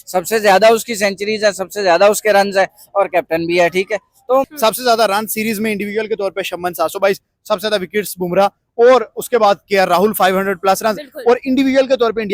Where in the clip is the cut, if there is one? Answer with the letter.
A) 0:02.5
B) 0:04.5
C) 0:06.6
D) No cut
B